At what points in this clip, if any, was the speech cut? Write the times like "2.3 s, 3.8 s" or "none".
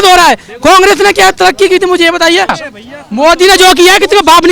2.6 s